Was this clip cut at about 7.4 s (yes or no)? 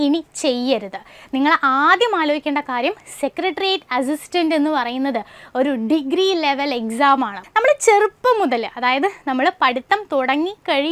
yes